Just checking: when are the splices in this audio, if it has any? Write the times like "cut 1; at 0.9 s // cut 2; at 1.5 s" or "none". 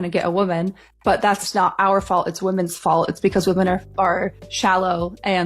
none